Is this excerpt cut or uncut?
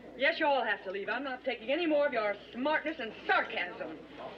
cut